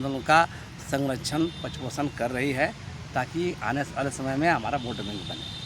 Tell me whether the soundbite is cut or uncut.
uncut